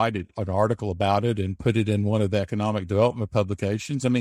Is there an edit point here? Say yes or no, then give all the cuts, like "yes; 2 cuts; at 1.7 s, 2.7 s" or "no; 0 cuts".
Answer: no; 0 cuts